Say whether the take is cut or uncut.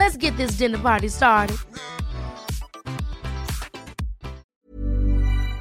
cut